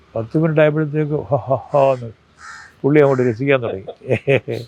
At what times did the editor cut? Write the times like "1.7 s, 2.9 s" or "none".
none